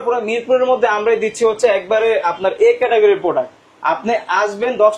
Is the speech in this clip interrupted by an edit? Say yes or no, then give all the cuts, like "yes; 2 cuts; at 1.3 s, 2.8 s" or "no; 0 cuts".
no; 0 cuts